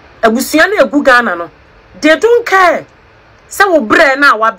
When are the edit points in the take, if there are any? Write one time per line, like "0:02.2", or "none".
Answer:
none